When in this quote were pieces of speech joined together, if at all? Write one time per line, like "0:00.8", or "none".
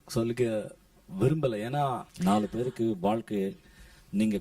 0:02.1

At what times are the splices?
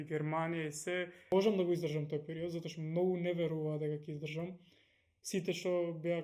0:01.3

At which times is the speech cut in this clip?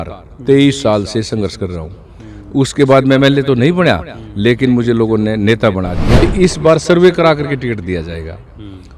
0:06.2

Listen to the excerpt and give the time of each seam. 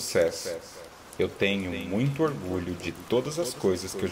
none

